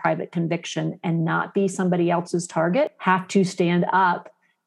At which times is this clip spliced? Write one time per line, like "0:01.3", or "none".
0:03.0